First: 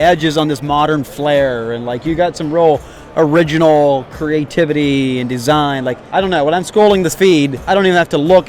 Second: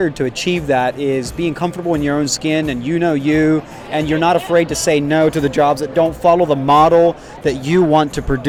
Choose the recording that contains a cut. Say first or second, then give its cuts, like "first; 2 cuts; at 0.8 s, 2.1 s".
first; 2 cuts; at 6.0 s, 7.6 s